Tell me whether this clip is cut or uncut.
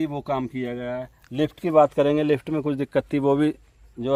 uncut